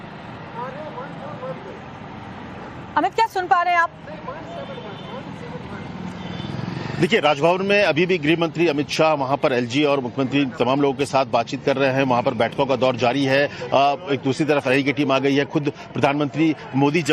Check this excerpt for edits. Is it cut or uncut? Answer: uncut